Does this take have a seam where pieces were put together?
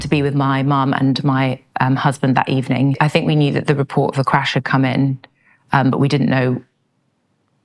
yes; 1 cut; at 3.0 s

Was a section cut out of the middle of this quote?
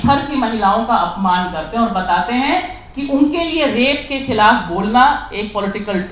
no; 0 cuts

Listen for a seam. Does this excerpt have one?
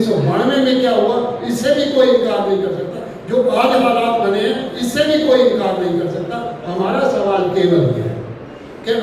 no; 0 cuts

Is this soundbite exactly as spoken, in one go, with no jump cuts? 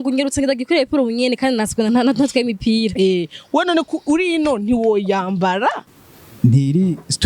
no; 1 cut; at 5.8 s

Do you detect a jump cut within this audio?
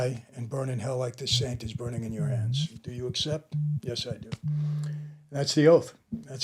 no; 0 cuts

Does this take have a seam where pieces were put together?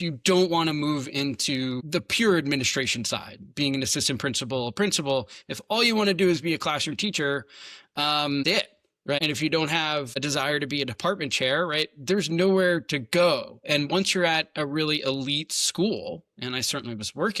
yes; 2 cuts; at 9.2 s, 10.2 s

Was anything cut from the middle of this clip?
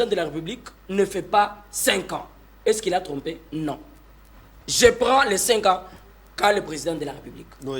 no; 0 cuts

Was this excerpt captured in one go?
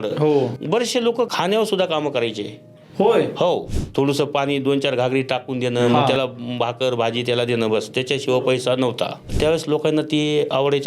no; 2 cuts; at 3.7 s, 9.3 s

